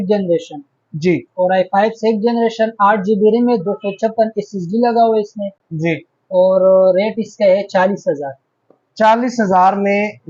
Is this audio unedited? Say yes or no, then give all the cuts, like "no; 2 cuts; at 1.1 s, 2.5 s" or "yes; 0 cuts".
yes; 0 cuts